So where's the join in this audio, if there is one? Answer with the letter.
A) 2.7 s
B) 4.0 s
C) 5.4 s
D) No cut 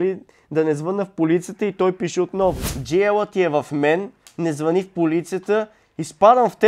A